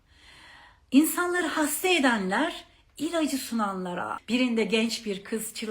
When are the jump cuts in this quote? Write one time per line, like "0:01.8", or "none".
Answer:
0:04.1

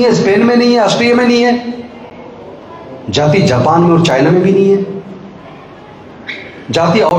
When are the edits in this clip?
none

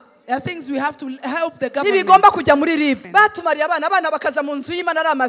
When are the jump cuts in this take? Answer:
0:03.0

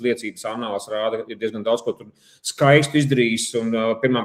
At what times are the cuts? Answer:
none

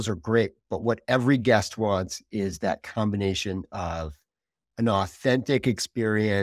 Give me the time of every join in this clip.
none

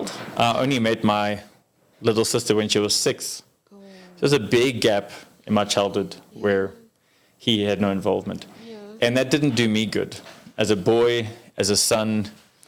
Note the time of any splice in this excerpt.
none

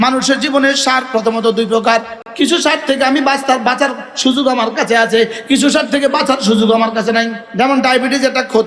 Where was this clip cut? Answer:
0:02.2
0:07.4

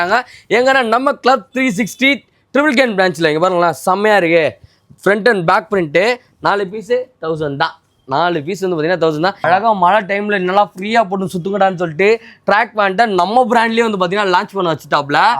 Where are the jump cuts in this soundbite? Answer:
0:09.5

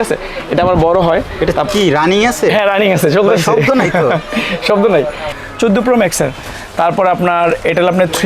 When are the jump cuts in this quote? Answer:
0:05.3

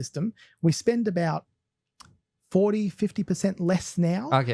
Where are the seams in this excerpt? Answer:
none

